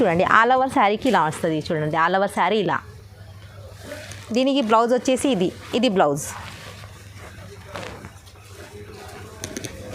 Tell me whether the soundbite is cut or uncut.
uncut